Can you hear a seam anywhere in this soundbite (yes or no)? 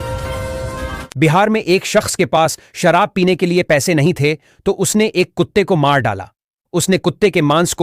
yes